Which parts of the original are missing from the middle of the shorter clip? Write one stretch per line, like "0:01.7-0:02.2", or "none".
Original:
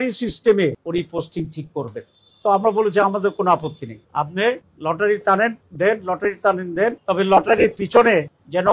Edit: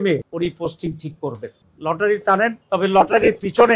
0:02.2-0:04.7
0:05.6-0:07.0